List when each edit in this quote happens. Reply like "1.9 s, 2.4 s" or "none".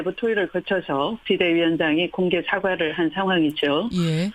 none